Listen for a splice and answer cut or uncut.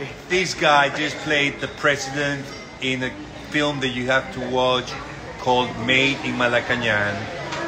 uncut